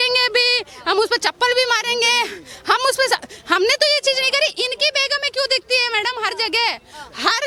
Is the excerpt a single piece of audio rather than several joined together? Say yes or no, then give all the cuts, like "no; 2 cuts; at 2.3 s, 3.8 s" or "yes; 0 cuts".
yes; 0 cuts